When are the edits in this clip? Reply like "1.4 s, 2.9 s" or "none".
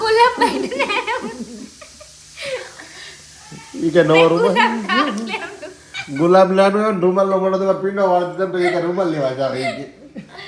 none